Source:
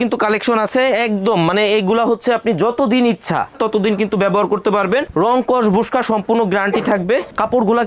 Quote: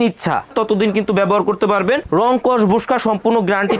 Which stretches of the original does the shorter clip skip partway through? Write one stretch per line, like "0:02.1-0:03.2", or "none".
none